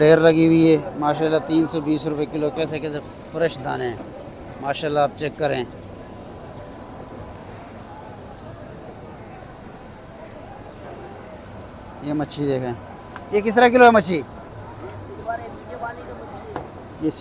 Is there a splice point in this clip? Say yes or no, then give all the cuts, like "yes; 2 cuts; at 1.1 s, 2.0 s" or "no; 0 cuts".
no; 0 cuts